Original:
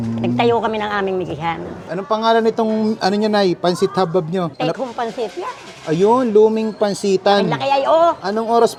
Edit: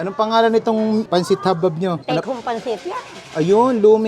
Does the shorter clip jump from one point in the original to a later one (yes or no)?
yes